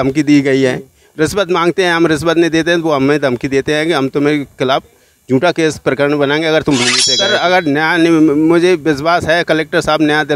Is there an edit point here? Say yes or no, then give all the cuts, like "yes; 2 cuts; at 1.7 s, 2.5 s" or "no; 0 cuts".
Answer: yes; 1 cut; at 6.9 s